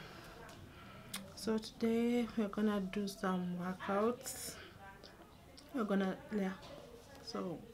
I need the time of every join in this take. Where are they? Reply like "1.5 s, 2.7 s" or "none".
none